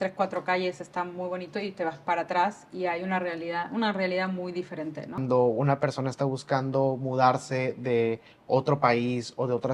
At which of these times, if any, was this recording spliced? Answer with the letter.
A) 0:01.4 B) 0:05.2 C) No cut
B